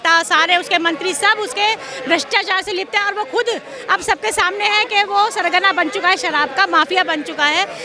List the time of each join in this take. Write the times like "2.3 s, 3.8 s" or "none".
none